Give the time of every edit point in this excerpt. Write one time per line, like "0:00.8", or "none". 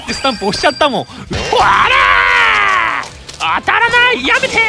0:01.2